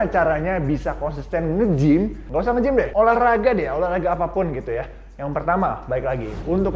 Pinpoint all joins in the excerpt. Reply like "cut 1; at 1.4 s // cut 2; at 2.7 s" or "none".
cut 1; at 2.7 s